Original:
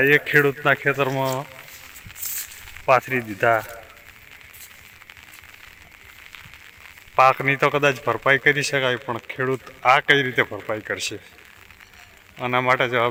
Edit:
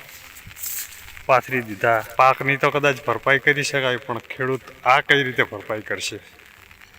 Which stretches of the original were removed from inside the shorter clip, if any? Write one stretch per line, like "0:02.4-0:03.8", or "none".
0:03.7-0:07.1